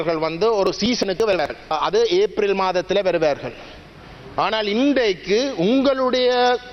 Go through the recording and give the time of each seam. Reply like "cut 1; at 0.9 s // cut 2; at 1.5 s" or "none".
cut 1; at 1.7 s